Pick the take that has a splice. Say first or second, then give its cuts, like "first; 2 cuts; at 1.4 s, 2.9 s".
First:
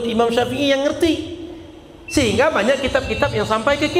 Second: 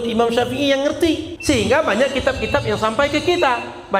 second; 1 cut; at 1.3 s